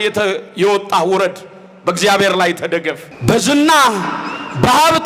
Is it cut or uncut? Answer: cut